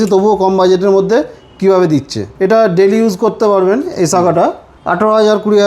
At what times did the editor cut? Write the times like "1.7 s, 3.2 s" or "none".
2.2 s, 4.7 s